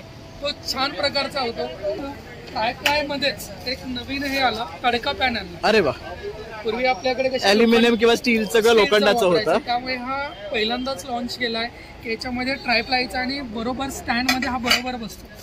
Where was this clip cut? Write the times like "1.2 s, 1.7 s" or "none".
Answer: 2.0 s